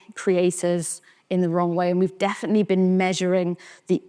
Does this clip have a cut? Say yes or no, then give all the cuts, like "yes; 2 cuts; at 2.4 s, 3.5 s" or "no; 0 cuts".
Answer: no; 0 cuts